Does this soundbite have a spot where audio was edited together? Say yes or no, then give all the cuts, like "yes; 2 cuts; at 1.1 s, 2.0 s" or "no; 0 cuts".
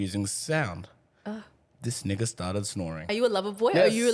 yes; 1 cut; at 3.1 s